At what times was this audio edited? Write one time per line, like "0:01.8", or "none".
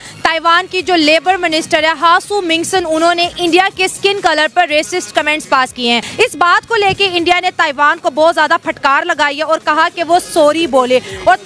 0:06.1